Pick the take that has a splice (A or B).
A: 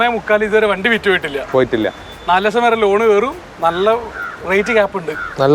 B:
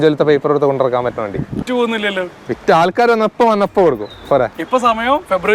B